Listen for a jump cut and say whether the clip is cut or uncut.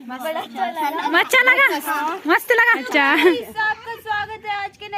cut